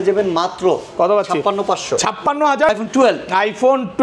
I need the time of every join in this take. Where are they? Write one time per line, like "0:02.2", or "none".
0:02.7